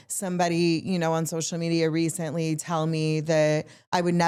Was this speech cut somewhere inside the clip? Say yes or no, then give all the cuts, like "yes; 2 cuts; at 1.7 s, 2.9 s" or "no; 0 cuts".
no; 0 cuts